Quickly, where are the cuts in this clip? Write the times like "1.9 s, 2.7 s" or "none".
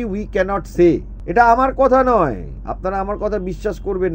1.2 s

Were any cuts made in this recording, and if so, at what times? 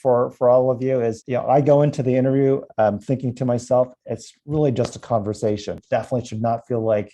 1.2 s, 5.8 s

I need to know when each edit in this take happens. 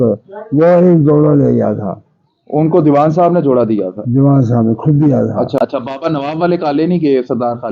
5.6 s

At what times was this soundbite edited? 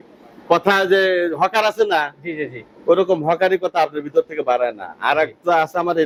none

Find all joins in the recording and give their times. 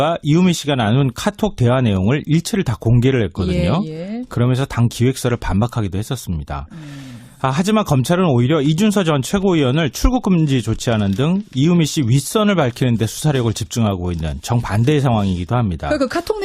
7.0 s

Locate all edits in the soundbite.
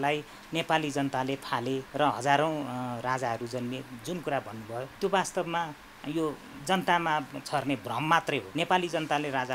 1.9 s, 4.9 s, 8.5 s

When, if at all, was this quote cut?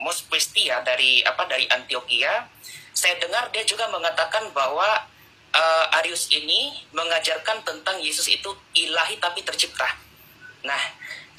none

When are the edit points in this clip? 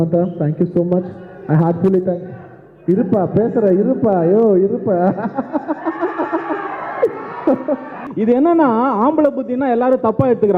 8.0 s

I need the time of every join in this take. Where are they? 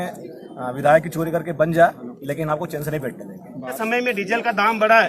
3.8 s

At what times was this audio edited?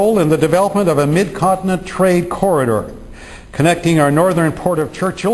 3.0 s

